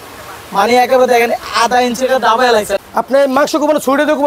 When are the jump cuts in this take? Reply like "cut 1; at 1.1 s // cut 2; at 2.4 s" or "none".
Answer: cut 1; at 2.7 s